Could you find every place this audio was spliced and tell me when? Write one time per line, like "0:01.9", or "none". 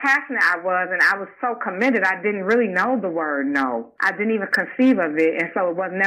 none